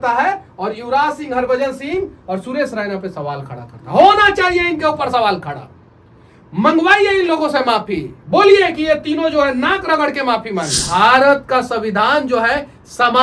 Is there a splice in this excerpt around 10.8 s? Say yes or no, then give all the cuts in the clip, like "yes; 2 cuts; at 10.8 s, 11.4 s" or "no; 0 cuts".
yes; 1 cut; at 10.8 s